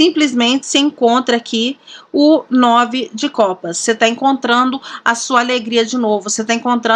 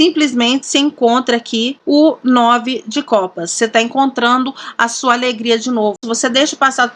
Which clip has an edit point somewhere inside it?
second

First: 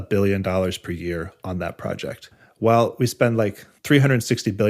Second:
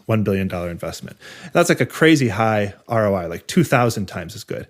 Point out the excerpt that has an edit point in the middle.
first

